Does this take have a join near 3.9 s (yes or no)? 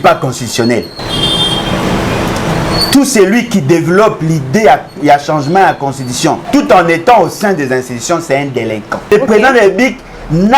no